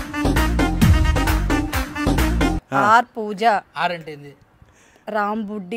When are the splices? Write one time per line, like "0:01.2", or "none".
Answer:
0:02.6